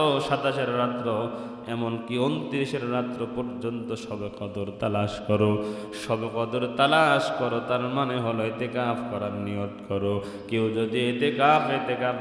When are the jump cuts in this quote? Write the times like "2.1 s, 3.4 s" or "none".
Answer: none